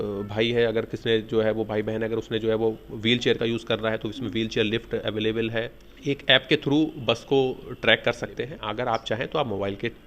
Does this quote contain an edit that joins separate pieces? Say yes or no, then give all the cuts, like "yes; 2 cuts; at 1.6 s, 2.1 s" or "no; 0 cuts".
yes; 2 cuts; at 5.8 s, 8.6 s